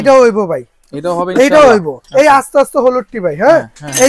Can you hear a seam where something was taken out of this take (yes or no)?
yes